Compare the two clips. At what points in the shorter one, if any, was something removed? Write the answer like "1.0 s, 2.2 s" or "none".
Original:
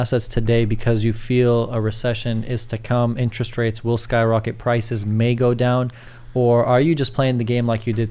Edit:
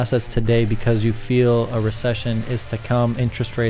none